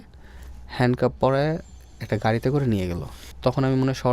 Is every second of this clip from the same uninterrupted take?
no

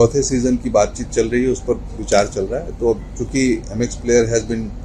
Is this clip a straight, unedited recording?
yes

